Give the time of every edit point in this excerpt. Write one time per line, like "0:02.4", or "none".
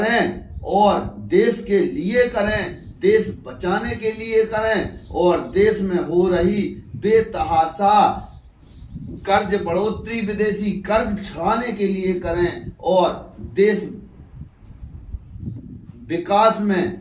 none